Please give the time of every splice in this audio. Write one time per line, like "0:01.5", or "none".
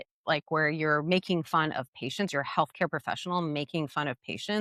none